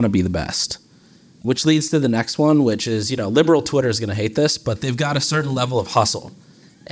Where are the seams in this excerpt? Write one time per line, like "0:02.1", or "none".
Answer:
0:01.4